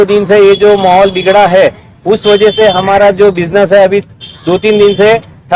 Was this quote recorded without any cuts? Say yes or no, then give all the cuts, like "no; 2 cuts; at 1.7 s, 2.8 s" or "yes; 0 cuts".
yes; 0 cuts